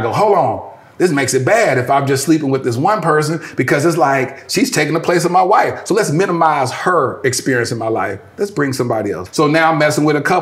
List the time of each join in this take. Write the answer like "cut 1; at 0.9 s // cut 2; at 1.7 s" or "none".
cut 1; at 9.2 s